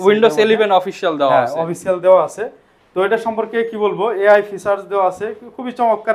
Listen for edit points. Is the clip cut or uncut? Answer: uncut